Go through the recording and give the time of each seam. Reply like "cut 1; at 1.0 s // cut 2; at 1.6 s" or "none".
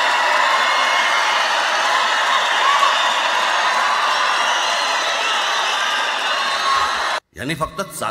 cut 1; at 7.2 s